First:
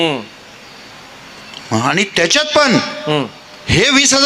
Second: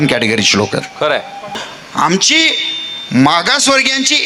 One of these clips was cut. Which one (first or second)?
second